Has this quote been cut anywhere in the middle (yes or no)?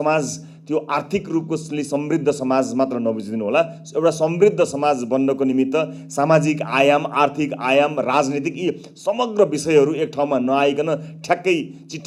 no